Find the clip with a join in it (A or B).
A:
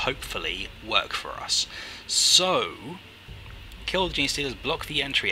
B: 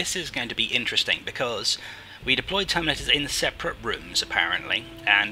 A